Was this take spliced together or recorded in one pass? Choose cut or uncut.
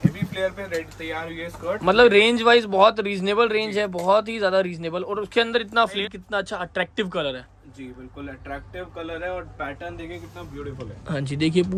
cut